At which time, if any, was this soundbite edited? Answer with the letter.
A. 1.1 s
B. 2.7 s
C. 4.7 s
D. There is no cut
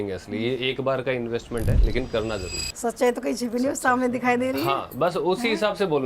B